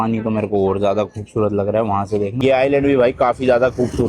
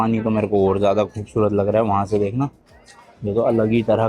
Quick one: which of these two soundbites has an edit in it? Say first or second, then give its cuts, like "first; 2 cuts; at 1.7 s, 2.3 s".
first; 1 cut; at 2.3 s